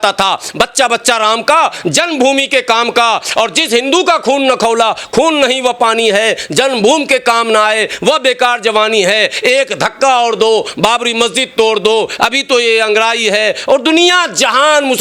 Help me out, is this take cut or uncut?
uncut